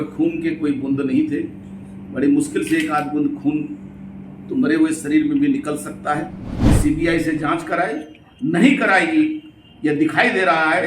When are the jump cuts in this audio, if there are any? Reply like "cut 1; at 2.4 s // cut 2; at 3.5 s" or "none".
cut 1; at 6.4 s